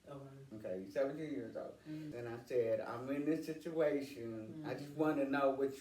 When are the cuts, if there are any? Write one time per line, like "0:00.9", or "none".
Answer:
0:02.1